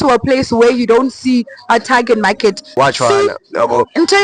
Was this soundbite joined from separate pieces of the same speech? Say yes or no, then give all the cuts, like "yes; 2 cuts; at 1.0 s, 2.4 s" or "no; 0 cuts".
yes; 1 cut; at 2.7 s